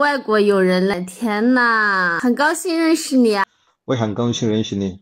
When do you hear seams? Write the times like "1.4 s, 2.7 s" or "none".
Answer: 0.9 s, 2.1 s, 3.4 s